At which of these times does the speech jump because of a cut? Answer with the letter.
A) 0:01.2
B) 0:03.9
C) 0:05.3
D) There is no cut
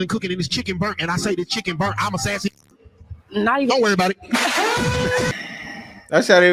C